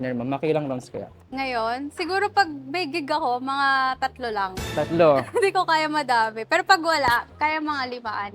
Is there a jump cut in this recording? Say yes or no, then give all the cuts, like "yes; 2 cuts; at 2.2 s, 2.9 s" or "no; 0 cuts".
no; 0 cuts